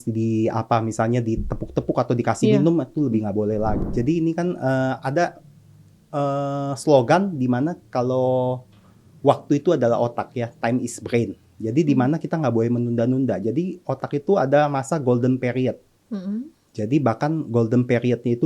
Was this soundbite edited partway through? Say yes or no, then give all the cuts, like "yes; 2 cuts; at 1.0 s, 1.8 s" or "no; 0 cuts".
yes; 1 cut; at 3.8 s